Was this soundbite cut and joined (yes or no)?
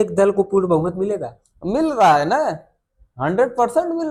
no